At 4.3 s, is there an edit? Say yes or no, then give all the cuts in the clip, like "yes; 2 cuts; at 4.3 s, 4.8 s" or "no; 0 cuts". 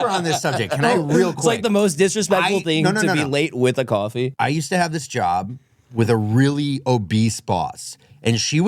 yes; 1 cut; at 4.3 s